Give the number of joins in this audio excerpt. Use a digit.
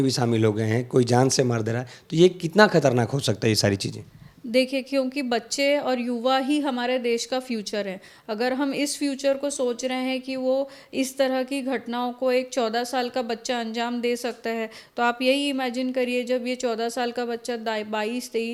0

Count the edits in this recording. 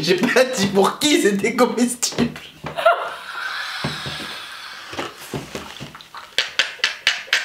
0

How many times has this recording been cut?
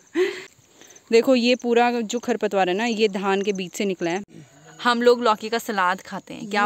2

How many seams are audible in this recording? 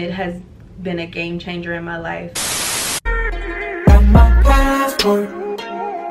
1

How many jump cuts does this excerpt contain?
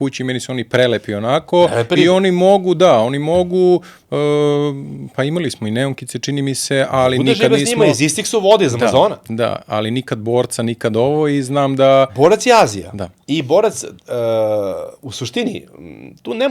0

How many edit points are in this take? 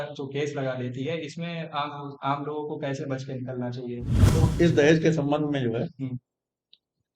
1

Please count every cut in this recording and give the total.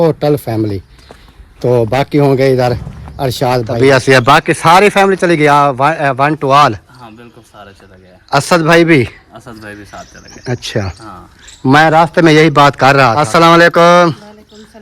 2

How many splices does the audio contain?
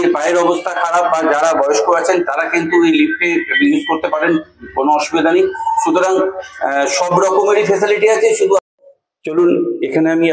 0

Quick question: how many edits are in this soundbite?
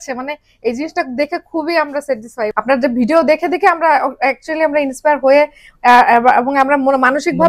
1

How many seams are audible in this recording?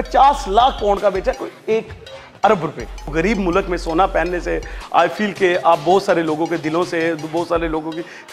1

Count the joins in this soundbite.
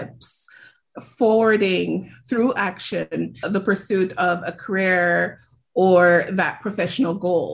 1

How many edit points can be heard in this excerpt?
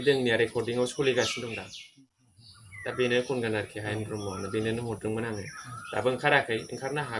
0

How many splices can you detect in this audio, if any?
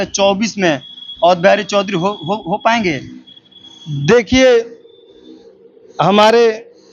0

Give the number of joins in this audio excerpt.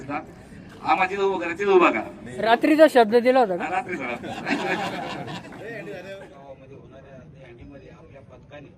2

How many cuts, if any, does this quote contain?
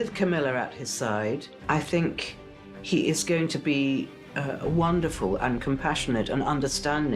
1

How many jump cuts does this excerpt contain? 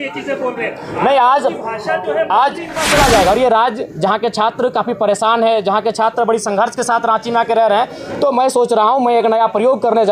1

